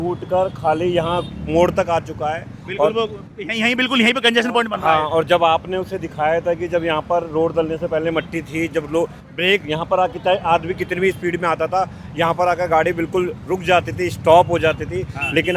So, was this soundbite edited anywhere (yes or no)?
no